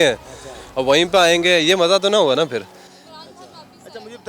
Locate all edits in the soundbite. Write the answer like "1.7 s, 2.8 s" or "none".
none